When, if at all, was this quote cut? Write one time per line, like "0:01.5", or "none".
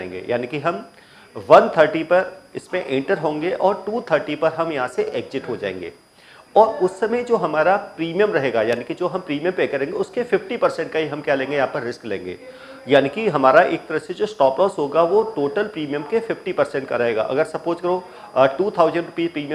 none